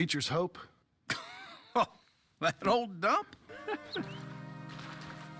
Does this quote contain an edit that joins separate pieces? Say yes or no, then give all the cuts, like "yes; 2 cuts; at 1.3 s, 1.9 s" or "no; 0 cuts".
yes; 1 cut; at 3.4 s